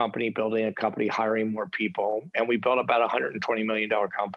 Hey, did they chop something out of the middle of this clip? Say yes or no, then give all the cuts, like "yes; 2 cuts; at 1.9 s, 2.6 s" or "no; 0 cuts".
no; 0 cuts